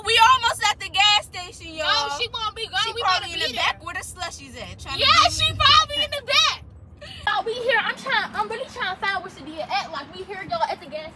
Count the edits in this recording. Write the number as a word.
zero